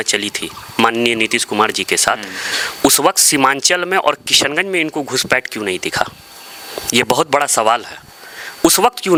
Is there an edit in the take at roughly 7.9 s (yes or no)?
no